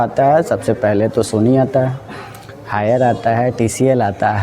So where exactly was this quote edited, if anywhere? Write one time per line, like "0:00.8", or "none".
none